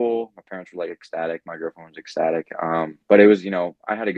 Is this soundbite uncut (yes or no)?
yes